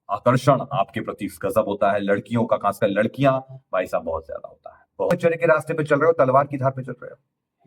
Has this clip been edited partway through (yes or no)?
yes